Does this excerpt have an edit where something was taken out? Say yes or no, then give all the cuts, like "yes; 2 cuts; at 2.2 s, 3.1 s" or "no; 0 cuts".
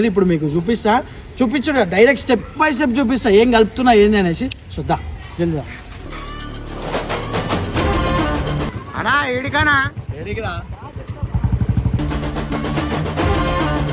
yes; 1 cut; at 8.7 s